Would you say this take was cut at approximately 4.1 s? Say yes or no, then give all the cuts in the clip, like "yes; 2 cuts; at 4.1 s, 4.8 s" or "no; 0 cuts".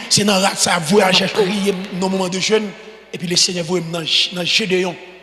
no; 1 cut; at 1.5 s